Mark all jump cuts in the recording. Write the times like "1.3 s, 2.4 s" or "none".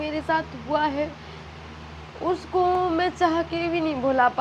none